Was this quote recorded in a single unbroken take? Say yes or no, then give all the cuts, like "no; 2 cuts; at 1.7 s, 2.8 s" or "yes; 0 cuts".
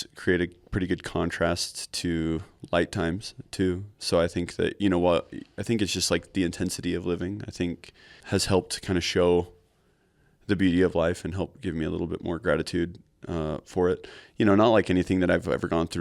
no; 1 cut; at 8.2 s